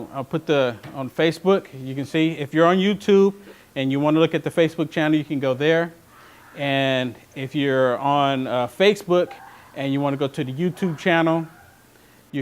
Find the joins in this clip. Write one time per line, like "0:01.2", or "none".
0:09.5